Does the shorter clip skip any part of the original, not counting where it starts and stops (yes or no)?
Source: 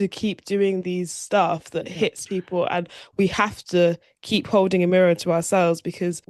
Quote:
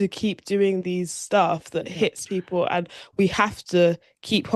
no